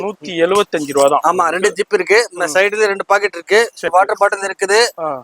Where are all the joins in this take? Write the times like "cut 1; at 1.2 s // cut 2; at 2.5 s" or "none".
cut 1; at 3.9 s